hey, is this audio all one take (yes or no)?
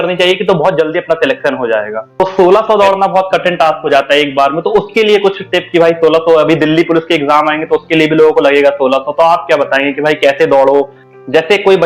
no